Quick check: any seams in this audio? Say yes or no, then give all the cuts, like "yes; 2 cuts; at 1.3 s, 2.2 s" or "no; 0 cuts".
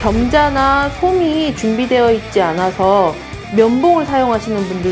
no; 0 cuts